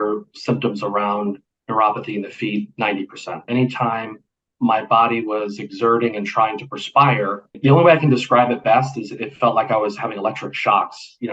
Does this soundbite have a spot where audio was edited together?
yes; 2 cuts; at 3.5 s, 7.6 s

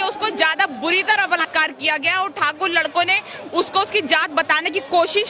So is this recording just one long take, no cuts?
no; 1 cut; at 1.4 s

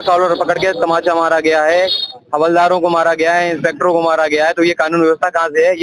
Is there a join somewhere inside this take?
no; 0 cuts

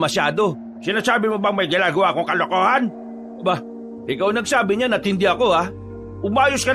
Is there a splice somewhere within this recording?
no; 0 cuts

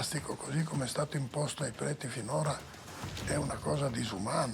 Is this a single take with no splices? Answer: yes; 0 cuts

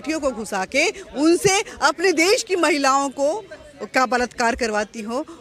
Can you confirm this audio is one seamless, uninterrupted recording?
yes; 0 cuts

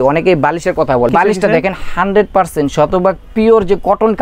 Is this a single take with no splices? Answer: no; 1 cut; at 1.1 s

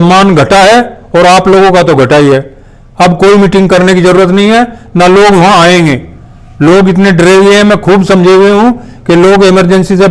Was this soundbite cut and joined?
no; 0 cuts

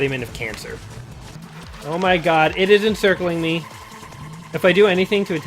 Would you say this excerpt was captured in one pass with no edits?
no; 1 cut; at 1.2 s

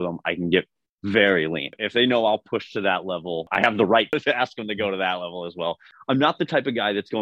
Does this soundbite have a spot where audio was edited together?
yes; 4 cuts; at 1.7 s, 3.5 s, 4.1 s, 5.9 s

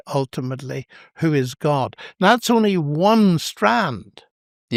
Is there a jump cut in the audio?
no; 0 cuts

